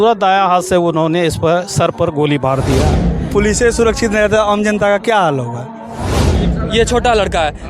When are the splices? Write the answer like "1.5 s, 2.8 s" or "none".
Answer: 3.2 s, 6.4 s